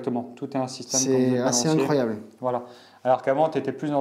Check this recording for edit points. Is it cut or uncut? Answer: uncut